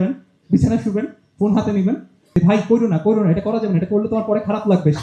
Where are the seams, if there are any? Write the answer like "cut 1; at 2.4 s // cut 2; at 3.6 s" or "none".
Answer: cut 1; at 2.3 s